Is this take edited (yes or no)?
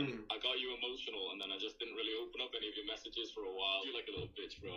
yes